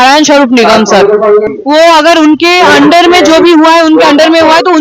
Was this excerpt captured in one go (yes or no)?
no